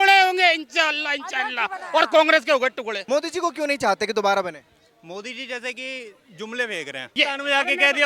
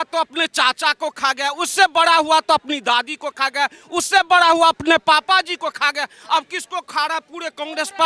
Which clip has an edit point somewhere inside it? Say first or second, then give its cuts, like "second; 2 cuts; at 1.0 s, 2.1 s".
first; 2 cuts; at 3.0 s, 7.1 s